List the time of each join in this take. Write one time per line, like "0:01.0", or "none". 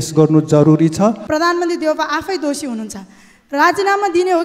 0:01.2